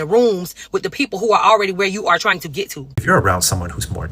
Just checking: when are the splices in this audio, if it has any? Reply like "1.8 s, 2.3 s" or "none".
2.9 s